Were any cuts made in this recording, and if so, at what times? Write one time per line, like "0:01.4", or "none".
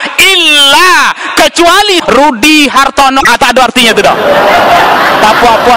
0:02.0